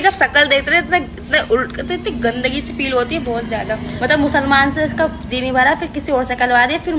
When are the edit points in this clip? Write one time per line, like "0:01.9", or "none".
0:04.0